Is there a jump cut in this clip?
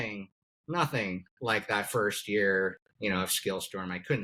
no; 0 cuts

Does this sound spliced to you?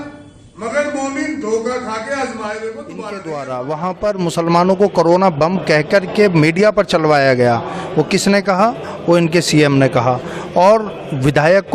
yes; 1 cut; at 3.2 s

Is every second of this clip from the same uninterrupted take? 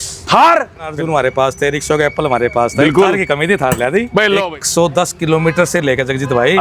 no; 2 cuts; at 1.3 s, 4.4 s

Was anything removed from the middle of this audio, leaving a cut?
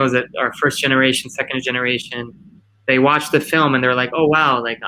no; 0 cuts

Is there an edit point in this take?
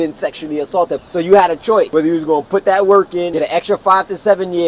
yes; 3 cuts; at 1.0 s, 1.9 s, 3.3 s

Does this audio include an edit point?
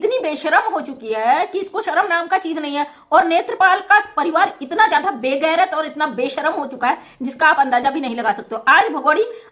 no; 0 cuts

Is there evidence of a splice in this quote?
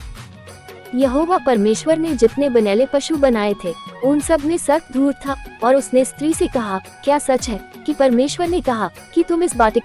yes; 1 cut; at 0.9 s

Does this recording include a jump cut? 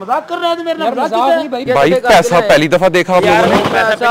yes; 1 cut; at 1.7 s

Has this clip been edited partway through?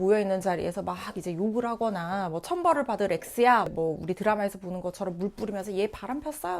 yes; 1 cut; at 3.7 s

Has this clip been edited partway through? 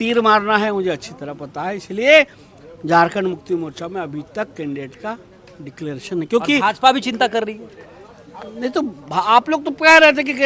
no; 0 cuts

